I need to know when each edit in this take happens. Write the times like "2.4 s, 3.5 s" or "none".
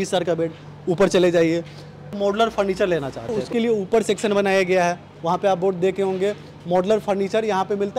none